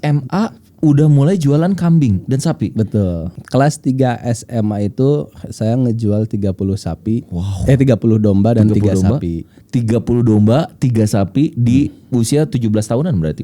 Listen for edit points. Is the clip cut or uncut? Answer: cut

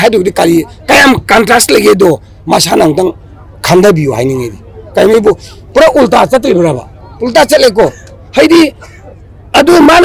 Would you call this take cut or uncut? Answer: uncut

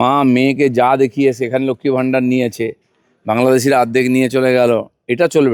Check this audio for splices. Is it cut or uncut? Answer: uncut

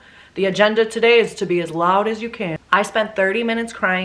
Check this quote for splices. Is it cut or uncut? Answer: cut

